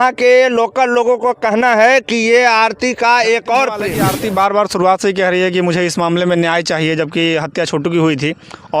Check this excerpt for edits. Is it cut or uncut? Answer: cut